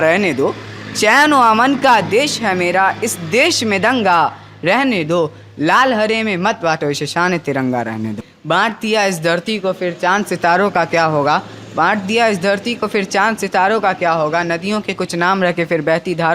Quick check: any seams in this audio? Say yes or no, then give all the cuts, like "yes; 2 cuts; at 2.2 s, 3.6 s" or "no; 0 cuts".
yes; 1 cut; at 8.3 s